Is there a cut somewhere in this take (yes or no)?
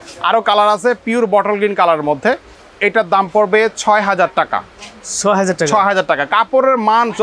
no